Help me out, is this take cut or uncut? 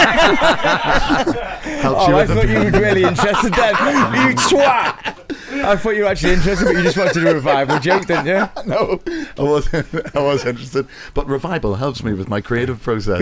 uncut